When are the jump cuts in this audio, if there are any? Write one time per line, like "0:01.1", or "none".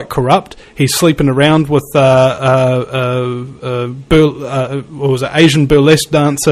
0:01.8